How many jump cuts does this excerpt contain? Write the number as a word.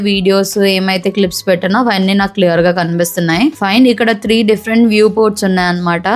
zero